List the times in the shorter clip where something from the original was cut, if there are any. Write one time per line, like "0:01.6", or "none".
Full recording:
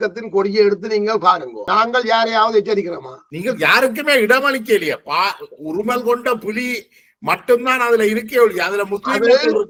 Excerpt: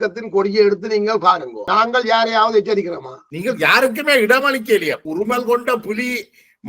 0:05.0